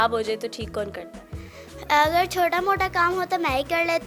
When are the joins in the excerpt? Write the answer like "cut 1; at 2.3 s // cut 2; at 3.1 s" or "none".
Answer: none